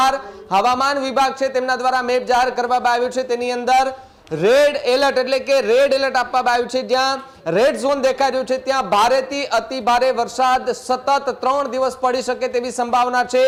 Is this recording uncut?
yes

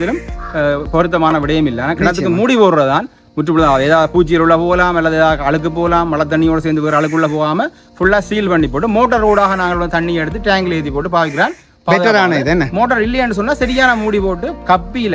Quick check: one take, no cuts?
yes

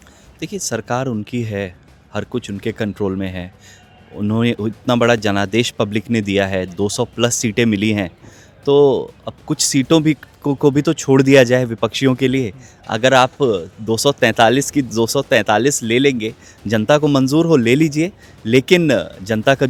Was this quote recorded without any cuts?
yes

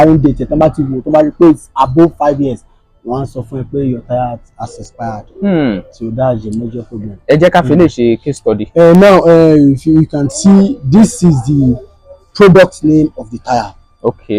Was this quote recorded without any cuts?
yes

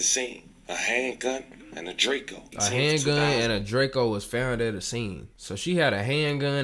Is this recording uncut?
no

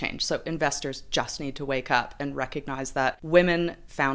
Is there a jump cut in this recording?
yes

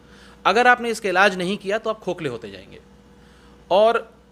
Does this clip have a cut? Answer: no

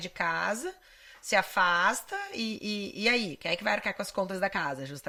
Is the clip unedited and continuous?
yes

